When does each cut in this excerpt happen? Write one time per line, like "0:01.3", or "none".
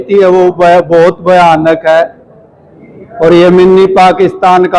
none